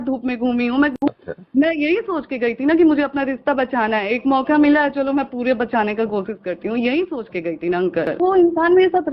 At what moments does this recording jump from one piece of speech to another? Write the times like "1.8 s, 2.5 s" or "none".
0.9 s, 8.2 s